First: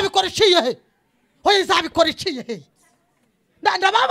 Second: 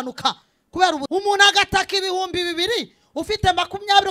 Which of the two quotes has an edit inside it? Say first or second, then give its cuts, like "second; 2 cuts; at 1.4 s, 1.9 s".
second; 1 cut; at 1.0 s